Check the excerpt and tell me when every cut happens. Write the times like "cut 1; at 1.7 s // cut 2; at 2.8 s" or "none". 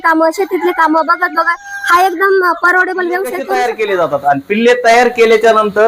cut 1; at 3.4 s